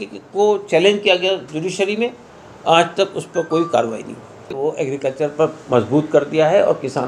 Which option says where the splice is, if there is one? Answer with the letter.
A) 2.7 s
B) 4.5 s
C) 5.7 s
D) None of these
B